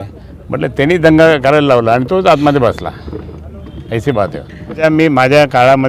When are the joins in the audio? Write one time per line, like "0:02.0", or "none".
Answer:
0:04.8